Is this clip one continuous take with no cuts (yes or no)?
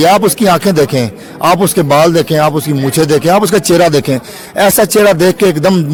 yes